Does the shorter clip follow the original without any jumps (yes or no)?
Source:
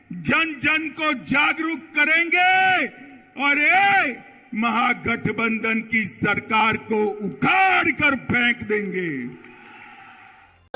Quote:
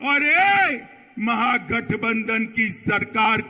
yes